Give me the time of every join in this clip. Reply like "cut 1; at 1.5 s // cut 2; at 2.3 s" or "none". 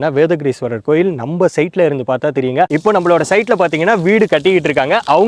cut 1; at 2.7 s